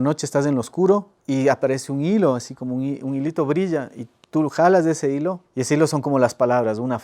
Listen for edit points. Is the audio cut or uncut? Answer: cut